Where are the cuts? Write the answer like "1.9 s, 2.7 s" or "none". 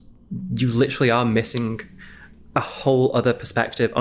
none